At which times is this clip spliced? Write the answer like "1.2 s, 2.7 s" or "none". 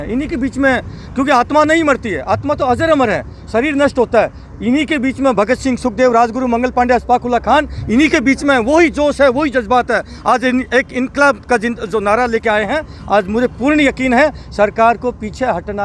none